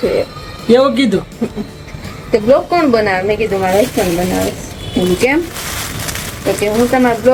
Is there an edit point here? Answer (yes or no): no